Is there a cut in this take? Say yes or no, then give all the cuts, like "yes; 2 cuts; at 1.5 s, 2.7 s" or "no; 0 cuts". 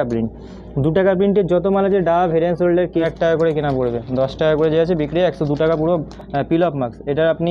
yes; 2 cuts; at 3.1 s, 6.1 s